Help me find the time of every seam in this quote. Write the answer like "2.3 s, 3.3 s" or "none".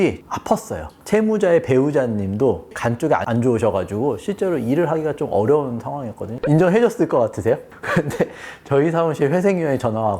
0.9 s, 2.7 s, 6.4 s, 7.8 s